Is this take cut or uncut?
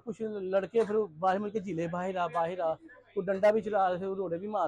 uncut